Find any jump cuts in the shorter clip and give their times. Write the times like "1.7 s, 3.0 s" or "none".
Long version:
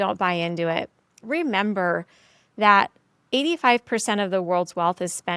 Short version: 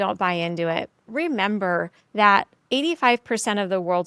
1.0 s, 2.3 s